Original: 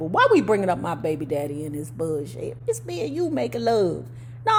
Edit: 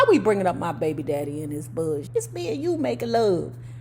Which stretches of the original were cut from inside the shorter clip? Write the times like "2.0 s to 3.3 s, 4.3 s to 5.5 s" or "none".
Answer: 2.3 s to 2.6 s

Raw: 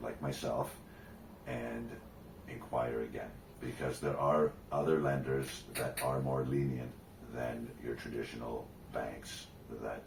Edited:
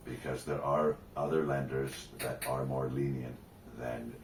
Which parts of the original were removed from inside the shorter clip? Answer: none

